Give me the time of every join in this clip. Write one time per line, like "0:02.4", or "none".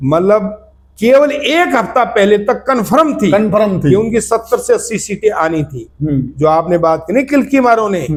none